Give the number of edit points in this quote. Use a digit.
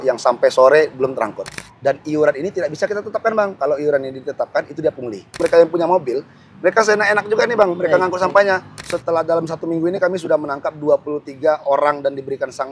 3